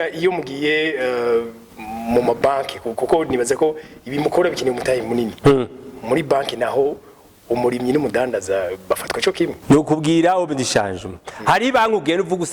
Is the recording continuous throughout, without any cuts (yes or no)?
no